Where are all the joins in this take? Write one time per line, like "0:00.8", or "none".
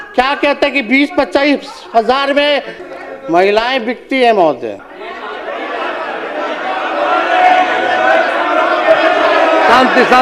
0:02.8
0:04.9

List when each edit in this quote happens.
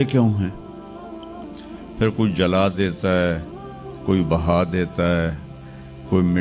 none

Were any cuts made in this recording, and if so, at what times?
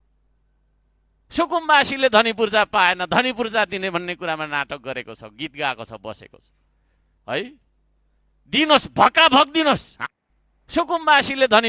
0:09.9

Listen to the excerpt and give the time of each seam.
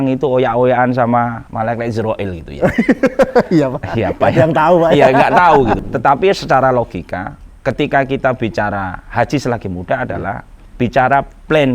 0:01.4
0:05.8

